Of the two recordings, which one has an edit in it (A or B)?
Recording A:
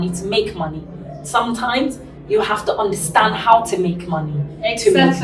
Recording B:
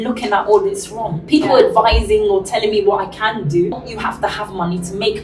B